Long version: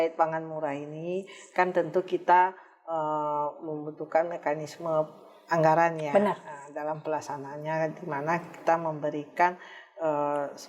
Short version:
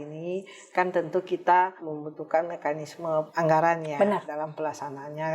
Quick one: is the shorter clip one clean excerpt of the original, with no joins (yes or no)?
no